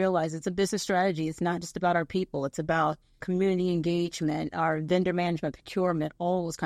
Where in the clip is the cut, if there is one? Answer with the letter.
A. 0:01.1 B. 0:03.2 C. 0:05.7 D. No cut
B